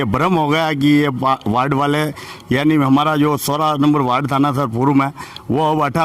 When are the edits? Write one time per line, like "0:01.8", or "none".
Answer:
none